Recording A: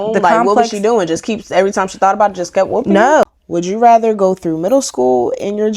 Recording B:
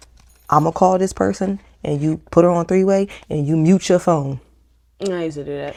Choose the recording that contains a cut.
A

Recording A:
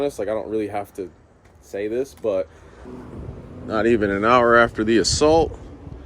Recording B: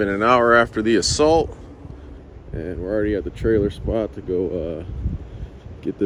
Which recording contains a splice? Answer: A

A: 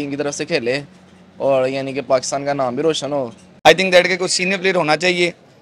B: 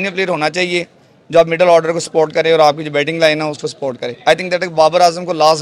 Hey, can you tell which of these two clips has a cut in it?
A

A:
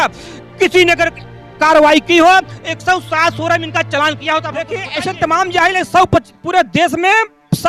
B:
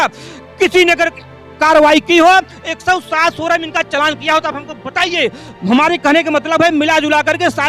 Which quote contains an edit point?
A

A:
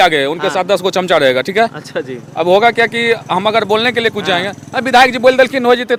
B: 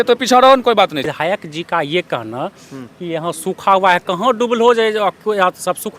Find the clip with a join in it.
B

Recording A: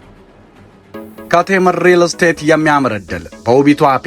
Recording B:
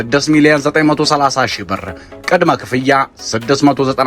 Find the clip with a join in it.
A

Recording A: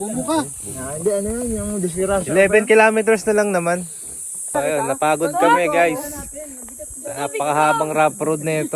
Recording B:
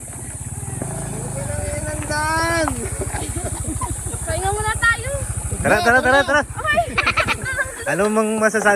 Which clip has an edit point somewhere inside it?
A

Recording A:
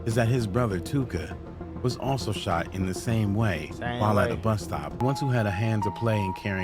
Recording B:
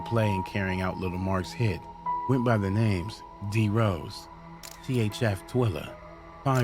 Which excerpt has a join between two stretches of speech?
A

